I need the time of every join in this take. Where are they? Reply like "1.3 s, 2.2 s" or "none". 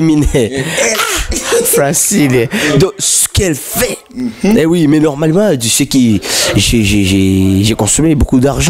none